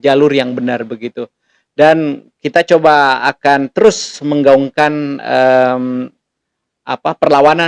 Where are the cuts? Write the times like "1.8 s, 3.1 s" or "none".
none

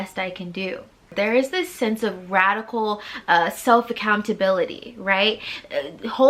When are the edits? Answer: 1.1 s

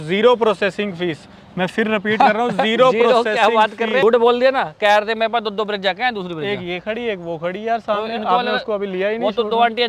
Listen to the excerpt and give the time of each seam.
4.0 s

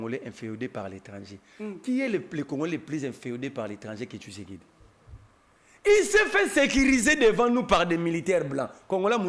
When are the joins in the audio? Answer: none

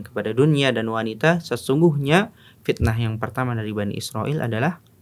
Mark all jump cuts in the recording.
none

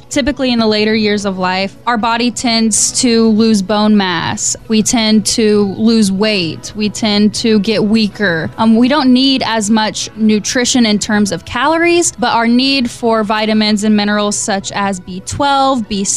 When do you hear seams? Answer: none

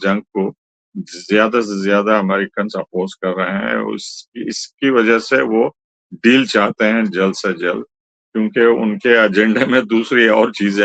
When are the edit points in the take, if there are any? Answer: none

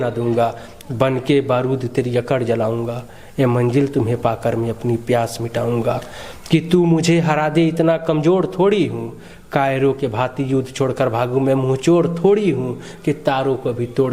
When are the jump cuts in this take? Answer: none

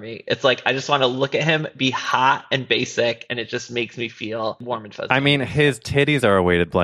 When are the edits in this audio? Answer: 4.6 s

